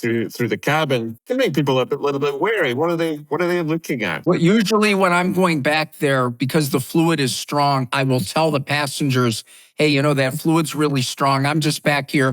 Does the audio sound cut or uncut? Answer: cut